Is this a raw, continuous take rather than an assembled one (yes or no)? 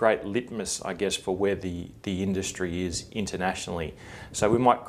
no